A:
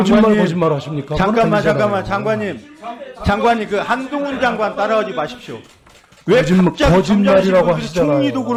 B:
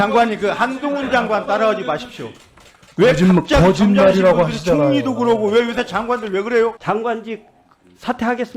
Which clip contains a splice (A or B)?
B